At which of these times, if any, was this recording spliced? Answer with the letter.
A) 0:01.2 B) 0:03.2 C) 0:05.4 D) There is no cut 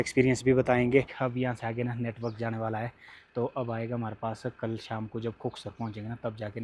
A